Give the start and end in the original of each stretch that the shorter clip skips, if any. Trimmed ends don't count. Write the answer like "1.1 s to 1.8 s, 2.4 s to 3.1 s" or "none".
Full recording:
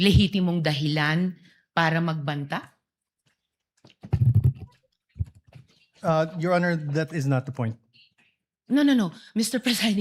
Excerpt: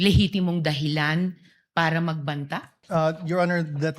2.7 s to 5.9 s